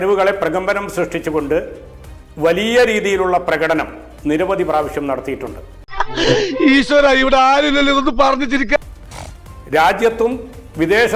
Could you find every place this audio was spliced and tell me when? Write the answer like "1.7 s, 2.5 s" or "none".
none